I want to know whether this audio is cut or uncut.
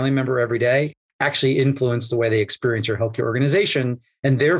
uncut